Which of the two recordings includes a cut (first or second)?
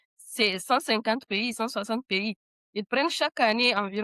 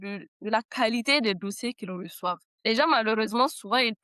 second